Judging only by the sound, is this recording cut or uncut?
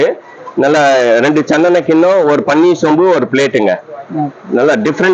uncut